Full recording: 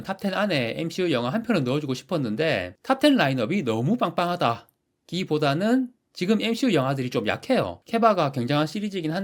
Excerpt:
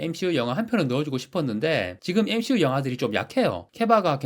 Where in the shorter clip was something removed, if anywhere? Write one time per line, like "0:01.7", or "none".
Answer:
0:02.0